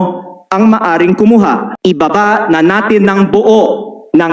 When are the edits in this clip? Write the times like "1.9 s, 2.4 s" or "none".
1.7 s